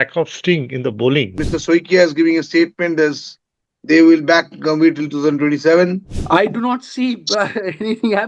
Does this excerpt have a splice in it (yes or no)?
yes